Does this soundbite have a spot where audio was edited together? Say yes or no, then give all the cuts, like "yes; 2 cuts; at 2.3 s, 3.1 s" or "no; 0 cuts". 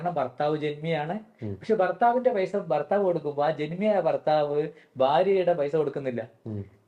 no; 0 cuts